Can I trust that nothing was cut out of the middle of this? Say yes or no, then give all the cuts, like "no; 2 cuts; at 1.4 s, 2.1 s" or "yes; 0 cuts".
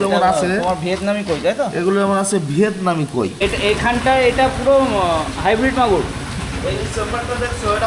no; 1 cut; at 3.3 s